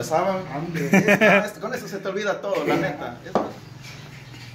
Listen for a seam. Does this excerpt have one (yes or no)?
yes